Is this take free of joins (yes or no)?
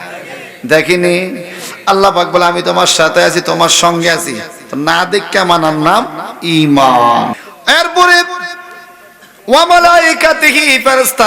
no